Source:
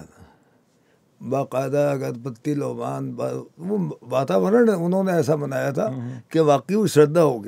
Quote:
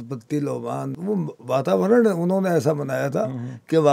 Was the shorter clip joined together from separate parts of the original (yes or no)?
yes